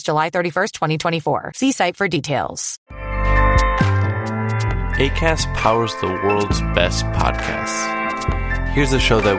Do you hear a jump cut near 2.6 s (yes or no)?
yes